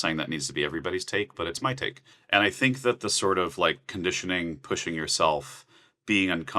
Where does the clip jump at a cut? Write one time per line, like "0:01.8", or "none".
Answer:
0:02.1